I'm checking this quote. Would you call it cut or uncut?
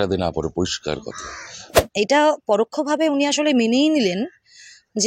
cut